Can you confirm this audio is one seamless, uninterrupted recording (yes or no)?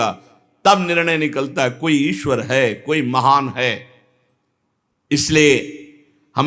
yes